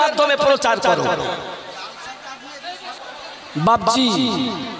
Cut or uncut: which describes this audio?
cut